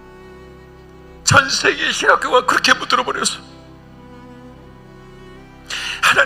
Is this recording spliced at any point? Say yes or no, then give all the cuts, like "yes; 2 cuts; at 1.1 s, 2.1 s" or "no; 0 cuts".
yes; 1 cut; at 1.0 s